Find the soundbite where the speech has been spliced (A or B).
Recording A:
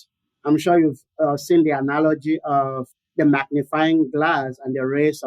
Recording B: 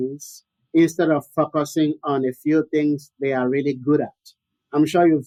A